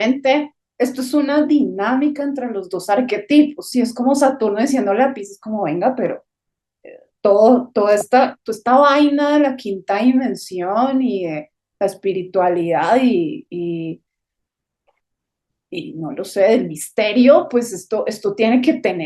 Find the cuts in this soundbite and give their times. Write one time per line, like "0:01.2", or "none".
none